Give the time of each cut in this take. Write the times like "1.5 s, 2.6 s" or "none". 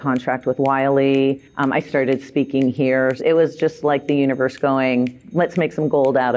3.2 s, 5.2 s

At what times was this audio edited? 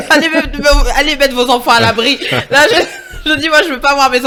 none

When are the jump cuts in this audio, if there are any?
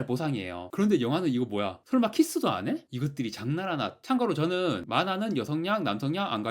4.0 s

